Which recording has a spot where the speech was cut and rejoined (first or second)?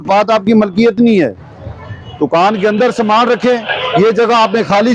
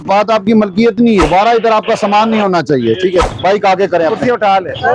second